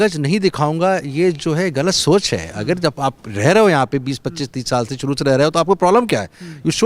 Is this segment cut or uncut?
uncut